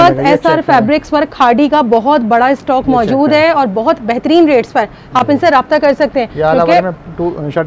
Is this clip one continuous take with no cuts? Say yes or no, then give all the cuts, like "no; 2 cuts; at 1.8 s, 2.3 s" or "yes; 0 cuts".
yes; 0 cuts